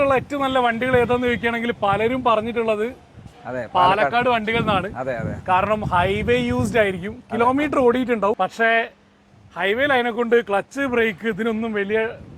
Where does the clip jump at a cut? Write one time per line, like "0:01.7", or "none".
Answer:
0:08.4